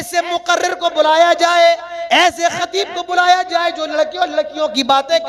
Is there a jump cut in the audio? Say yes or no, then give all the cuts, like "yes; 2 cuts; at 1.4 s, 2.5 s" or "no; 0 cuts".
no; 0 cuts